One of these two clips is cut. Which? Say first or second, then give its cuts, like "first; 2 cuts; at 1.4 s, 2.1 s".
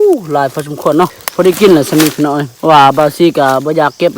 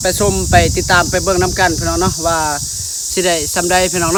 first; 2 cuts; at 1.2 s, 2.5 s